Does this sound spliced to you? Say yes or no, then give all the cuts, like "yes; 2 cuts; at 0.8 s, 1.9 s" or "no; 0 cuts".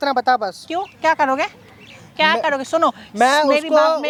no; 0 cuts